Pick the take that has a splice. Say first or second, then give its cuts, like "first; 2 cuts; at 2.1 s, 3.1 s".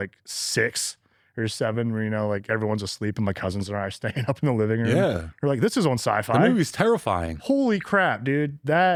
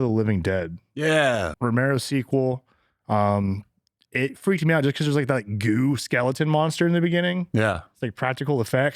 second; 1 cut; at 1.5 s